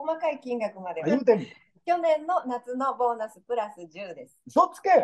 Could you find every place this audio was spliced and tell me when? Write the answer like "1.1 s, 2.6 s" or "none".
1.0 s